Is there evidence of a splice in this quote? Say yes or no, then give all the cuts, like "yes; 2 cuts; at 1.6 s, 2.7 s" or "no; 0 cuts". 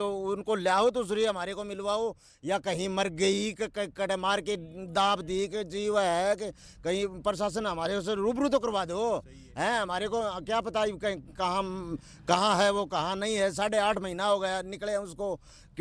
no; 0 cuts